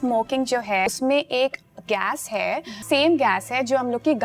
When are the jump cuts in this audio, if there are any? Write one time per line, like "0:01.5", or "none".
0:00.9
0:02.8